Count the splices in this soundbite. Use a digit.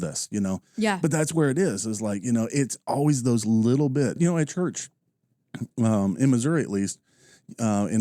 1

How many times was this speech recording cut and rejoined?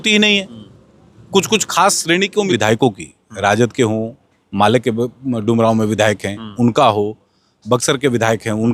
1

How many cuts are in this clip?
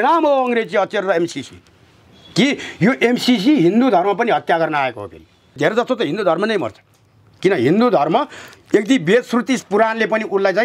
1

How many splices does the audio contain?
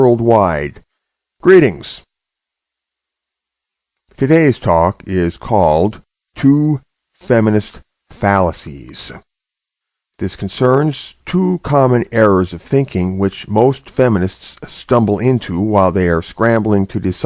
0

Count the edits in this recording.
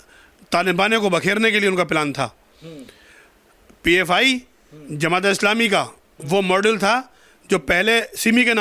0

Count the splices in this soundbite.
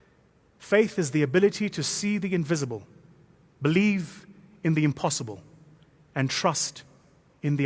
0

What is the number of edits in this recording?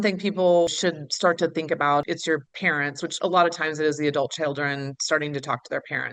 2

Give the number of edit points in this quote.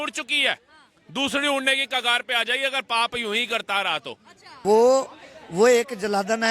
1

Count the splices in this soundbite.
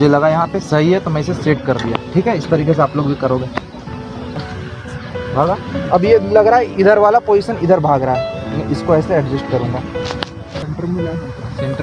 1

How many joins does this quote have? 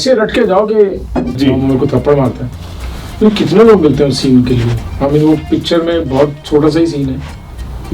1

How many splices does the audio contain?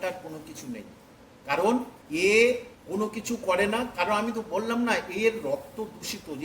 2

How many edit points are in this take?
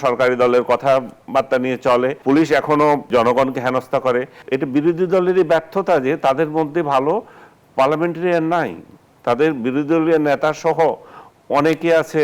3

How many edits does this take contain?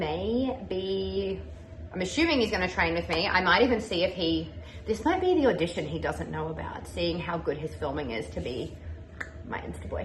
0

